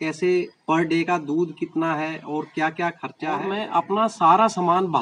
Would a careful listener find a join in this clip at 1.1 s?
no; 1 cut; at 3.4 s

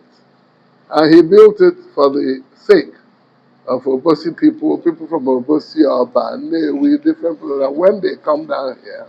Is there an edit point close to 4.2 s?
no; 0 cuts

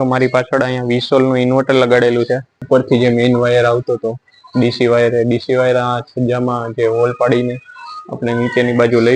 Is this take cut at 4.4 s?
no; 1 cut; at 2.5 s

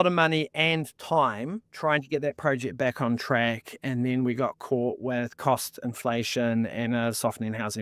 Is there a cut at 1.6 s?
yes; 1 cut; at 1.6 s

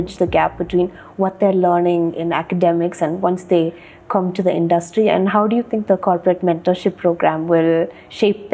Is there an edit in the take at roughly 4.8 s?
no; 0 cuts

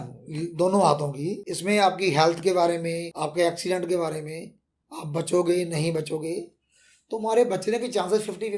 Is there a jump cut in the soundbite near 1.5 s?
yes; 2 cuts; at 1.5 s, 3.1 s

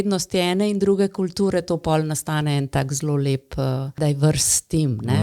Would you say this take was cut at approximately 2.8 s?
no; 1 cut; at 4.0 s

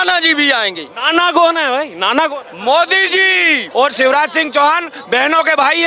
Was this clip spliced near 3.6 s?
yes; 1 cut; at 3.6 s

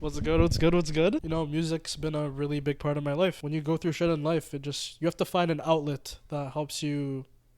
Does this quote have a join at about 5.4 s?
no; 2 cuts; at 1.2 s, 3.4 s

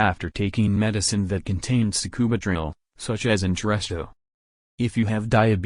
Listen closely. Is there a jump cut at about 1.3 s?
no; 0 cuts

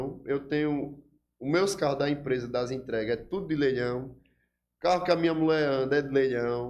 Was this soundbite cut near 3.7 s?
no; 0 cuts

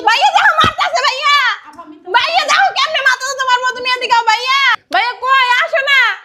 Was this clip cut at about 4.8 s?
yes; 1 cut; at 4.8 s

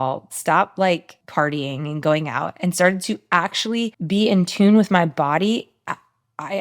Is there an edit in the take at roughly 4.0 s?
yes; 2 cuts; at 1.2 s, 4.0 s

